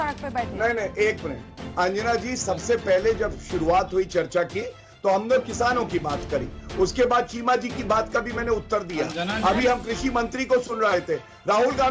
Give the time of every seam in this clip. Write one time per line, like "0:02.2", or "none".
none

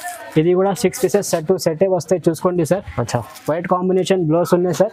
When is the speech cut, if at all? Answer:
none

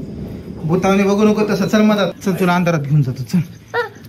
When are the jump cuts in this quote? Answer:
0:02.2

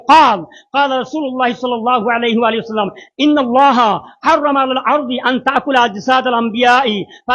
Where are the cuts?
none

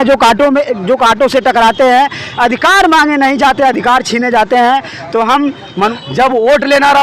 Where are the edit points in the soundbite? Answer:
0:05.9

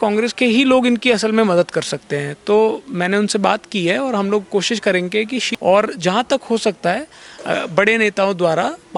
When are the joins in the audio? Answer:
0:05.5

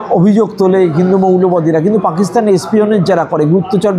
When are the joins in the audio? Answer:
none

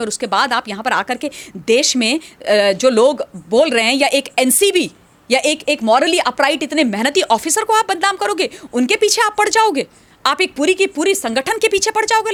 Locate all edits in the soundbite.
none

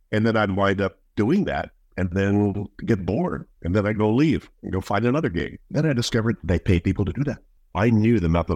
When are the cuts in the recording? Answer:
0:07.5

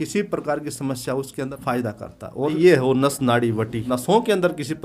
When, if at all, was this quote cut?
0:01.3
0:02.5
0:03.8

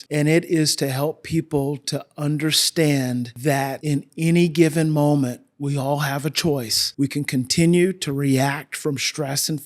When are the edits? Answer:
0:03.7
0:06.8

